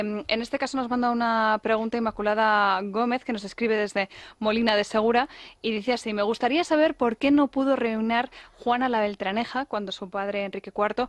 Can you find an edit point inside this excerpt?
no; 0 cuts

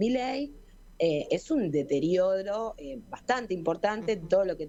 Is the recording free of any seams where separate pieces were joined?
yes; 0 cuts

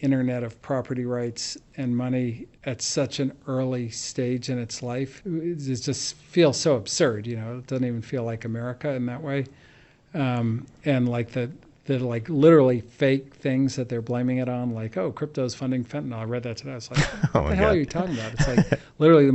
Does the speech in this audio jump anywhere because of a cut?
yes; 2 cuts; at 2.5 s, 5.2 s

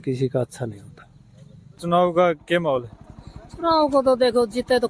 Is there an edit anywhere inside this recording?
yes; 1 cut; at 1.8 s

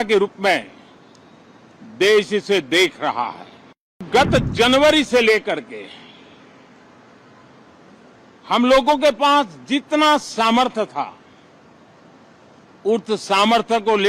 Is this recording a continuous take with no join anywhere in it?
no; 1 cut; at 4.1 s

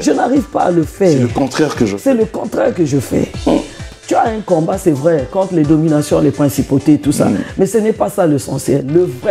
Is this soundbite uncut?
no; 1 cut; at 3.8 s

